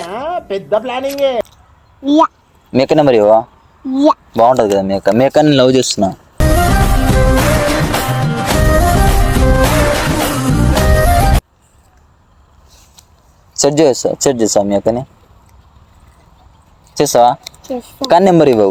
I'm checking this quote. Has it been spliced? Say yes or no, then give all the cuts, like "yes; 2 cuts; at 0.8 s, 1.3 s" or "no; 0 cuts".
no; 0 cuts